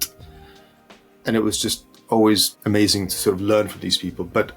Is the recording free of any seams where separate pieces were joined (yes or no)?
no